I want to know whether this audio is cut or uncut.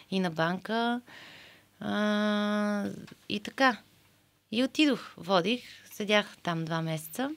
uncut